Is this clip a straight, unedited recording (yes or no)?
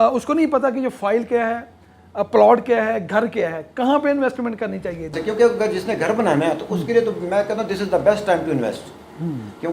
no